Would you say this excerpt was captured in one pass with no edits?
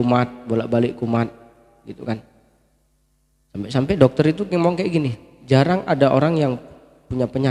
yes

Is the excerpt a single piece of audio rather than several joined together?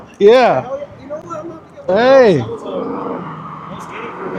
yes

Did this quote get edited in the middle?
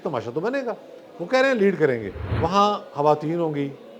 yes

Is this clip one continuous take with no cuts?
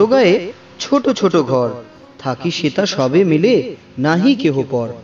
yes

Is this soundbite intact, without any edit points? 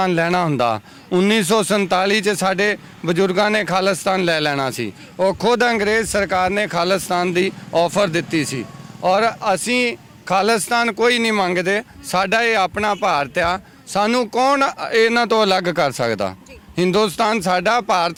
yes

